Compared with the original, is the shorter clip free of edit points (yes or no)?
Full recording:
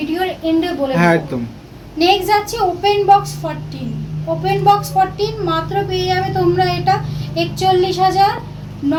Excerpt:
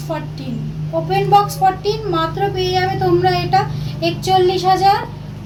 yes